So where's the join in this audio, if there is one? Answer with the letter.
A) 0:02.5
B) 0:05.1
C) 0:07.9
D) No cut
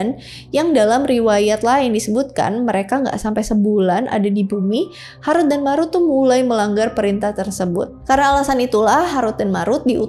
C